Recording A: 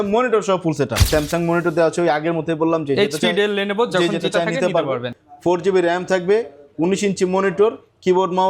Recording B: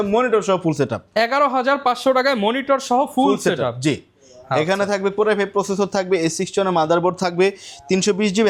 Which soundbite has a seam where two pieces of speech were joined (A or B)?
A